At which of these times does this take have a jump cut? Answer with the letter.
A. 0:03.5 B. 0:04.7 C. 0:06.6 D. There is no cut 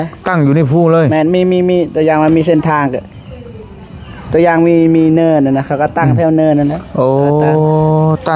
D